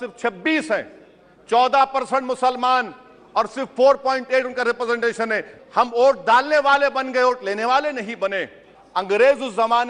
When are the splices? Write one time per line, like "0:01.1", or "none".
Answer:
0:05.5
0:08.7